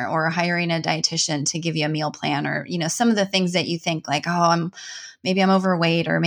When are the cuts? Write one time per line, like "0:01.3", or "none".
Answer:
none